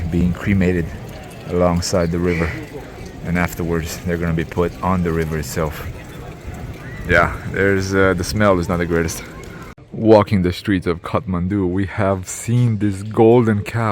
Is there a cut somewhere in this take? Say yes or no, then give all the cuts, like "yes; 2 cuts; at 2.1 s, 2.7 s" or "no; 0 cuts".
yes; 1 cut; at 9.8 s